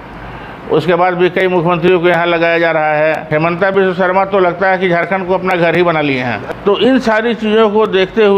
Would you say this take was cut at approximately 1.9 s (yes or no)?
no